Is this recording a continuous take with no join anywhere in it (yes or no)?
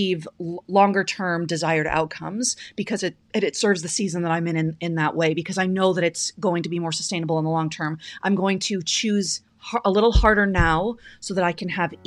yes